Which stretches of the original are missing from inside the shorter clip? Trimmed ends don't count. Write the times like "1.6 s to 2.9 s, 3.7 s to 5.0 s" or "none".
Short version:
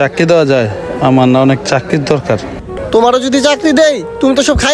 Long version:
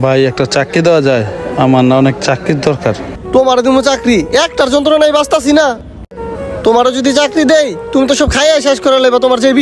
3.1 s to 6.3 s